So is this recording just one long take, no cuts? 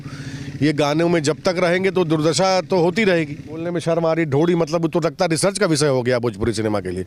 no; 1 cut; at 3.7 s

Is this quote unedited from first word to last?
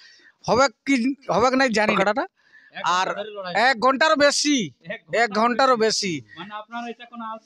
no; 1 cut; at 2.0 s

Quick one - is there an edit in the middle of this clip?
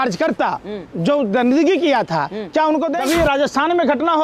yes; 1 cut; at 3.0 s

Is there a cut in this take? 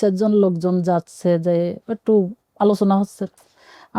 no; 0 cuts

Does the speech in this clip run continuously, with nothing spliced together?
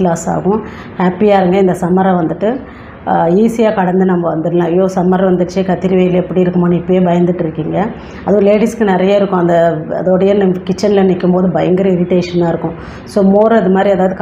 yes; 0 cuts

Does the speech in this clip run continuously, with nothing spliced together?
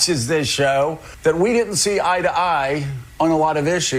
no; 1 cut; at 1.1 s

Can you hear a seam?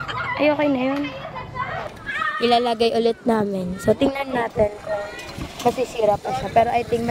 yes; 1 cut; at 2.0 s

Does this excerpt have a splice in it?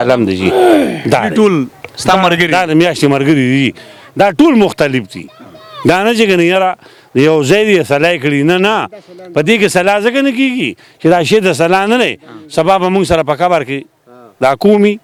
no; 0 cuts

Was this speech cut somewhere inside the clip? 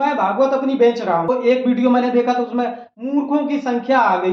yes; 1 cut; at 1.3 s

